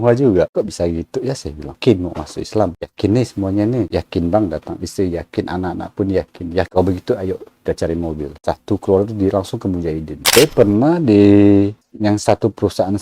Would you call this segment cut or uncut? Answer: cut